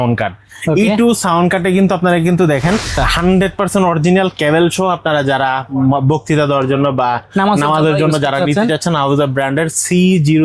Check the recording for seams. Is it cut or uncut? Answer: cut